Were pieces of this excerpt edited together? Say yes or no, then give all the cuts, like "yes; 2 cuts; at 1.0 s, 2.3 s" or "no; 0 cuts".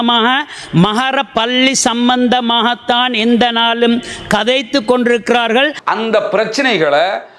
yes; 1 cut; at 5.8 s